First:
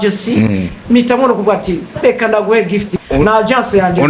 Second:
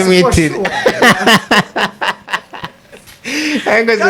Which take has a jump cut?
first; 1 cut; at 3.0 s

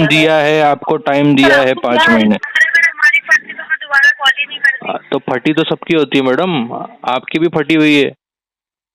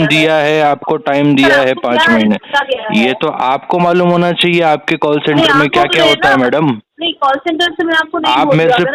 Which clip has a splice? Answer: first; 1 cut; at 2.4 s

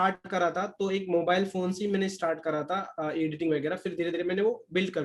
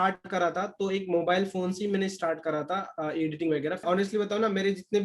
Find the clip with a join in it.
second; 1 cut; at 3.8 s

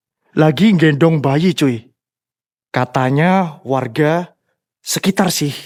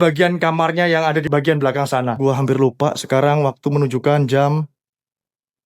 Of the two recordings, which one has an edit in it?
second; 2 cuts; at 1.3 s, 2.2 s

